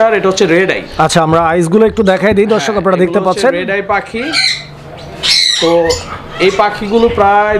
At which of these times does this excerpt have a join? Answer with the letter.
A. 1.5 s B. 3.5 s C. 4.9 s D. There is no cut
D